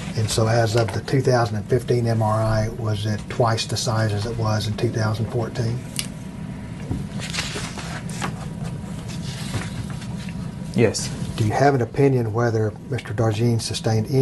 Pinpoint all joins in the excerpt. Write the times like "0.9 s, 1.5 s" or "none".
10.9 s

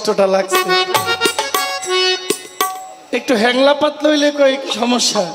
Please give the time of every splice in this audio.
2.9 s

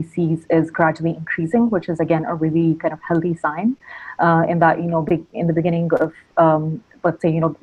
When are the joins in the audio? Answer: none

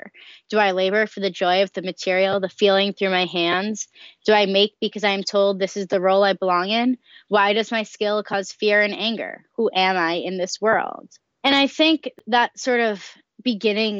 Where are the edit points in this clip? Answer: 11.1 s

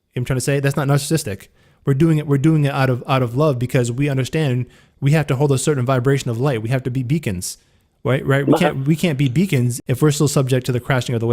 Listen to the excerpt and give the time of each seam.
9.7 s

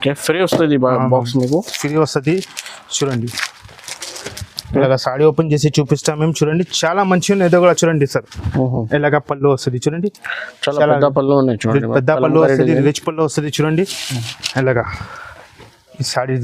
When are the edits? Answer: none

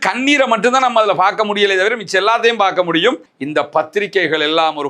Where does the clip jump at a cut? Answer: 3.3 s

